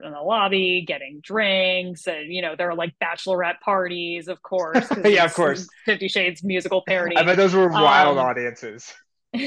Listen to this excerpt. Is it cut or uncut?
uncut